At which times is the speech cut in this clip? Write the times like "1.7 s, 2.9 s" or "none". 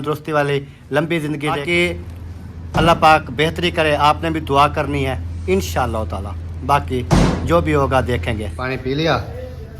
1.6 s, 8.2 s

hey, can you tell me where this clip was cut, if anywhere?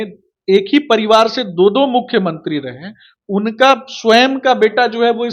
none

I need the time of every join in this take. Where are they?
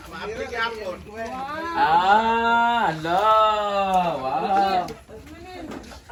none

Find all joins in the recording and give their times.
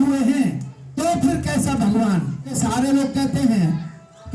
2.5 s

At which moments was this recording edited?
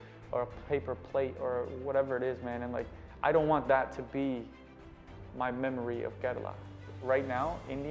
6.9 s

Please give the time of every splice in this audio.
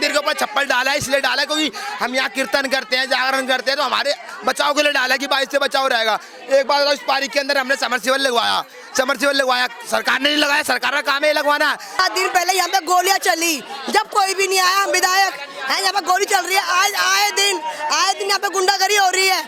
12.0 s

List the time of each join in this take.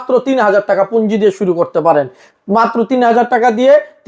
none

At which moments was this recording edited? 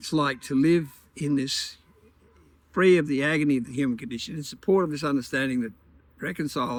none

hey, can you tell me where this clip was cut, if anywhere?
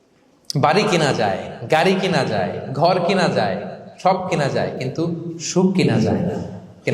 none

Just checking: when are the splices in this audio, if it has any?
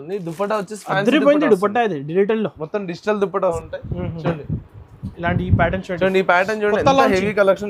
3.6 s

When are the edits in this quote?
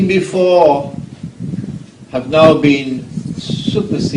1.5 s

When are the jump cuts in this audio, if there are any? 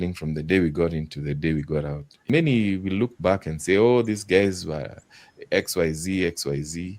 2.3 s

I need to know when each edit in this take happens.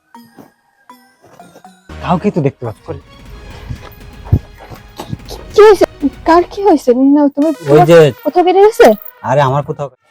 3.1 s

